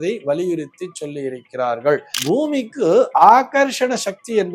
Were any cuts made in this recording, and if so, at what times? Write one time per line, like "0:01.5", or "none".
0:02.2